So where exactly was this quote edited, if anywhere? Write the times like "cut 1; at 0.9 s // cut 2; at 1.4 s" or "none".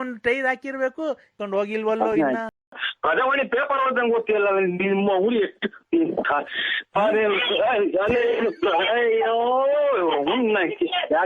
cut 1; at 1.3 s